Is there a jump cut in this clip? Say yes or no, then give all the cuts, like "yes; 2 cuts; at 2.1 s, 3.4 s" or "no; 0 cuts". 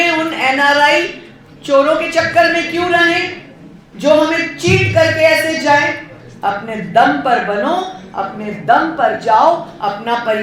no; 0 cuts